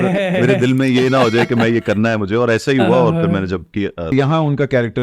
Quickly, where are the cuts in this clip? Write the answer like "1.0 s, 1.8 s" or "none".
4.1 s